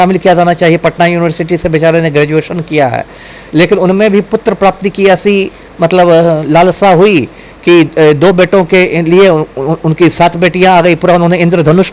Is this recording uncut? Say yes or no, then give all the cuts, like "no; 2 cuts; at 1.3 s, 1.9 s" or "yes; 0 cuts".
yes; 0 cuts